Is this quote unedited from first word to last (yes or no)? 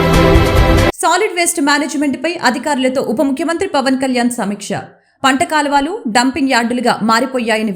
no